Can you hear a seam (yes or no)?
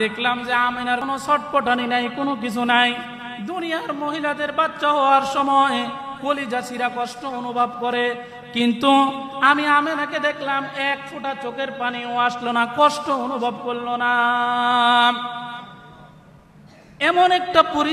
yes